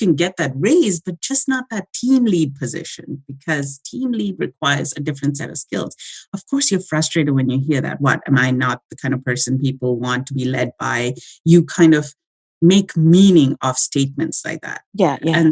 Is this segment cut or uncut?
uncut